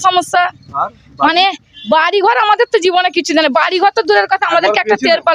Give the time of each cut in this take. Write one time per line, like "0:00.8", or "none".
none